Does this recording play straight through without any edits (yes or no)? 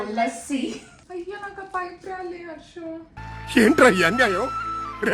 no